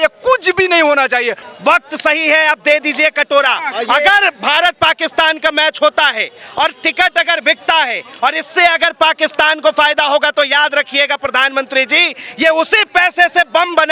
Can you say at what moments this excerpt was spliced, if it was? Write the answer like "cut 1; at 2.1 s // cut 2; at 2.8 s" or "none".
cut 1; at 1.4 s